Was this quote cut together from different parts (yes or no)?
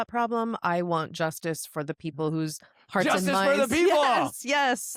no